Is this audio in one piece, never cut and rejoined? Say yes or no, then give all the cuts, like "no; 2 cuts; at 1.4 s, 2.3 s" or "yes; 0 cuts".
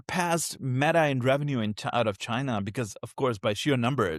yes; 0 cuts